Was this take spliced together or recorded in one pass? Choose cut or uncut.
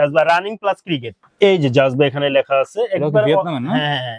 cut